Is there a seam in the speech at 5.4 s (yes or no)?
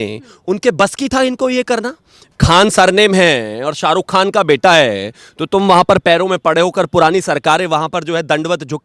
no